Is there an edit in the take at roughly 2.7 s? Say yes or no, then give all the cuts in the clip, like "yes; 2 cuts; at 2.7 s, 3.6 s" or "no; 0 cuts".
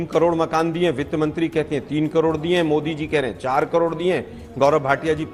no; 0 cuts